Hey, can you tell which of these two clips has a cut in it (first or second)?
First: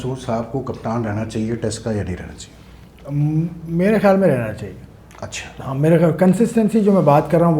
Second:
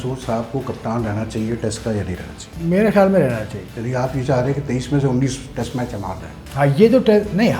second